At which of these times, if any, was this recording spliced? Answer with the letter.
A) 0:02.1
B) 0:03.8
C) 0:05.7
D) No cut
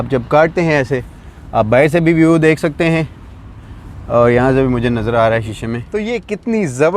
C